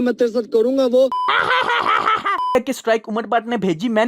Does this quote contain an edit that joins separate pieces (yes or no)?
yes